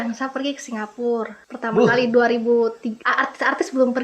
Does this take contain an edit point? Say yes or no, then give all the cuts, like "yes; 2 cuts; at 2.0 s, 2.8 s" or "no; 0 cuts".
yes; 2 cuts; at 1.4 s, 2.9 s